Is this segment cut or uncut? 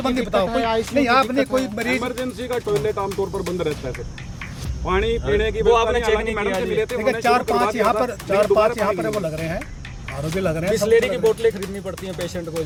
uncut